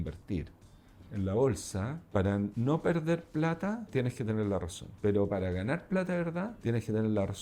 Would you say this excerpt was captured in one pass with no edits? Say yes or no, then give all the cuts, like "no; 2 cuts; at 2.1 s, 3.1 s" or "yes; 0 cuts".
no; 6 cuts; at 1.0 s, 2.0 s, 2.5 s, 3.9 s, 4.8 s, 6.5 s